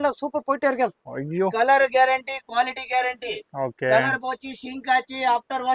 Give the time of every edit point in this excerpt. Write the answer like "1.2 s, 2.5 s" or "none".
1.0 s